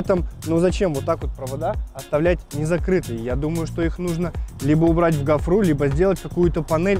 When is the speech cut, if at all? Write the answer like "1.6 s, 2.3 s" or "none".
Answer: none